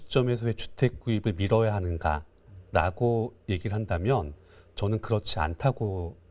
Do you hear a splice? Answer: no; 0 cuts

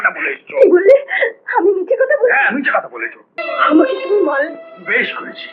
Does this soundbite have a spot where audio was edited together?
yes; 1 cut; at 3.4 s

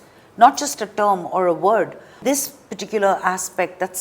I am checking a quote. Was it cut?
yes; 1 cut; at 2.2 s

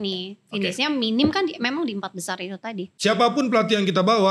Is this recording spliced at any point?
yes; 1 cut; at 2.9 s

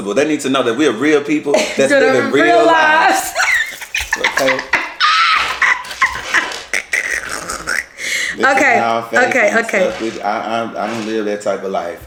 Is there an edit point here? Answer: no; 0 cuts

